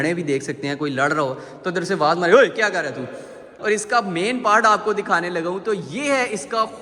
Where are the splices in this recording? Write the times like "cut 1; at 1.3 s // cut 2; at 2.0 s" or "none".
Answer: cut 1; at 3.5 s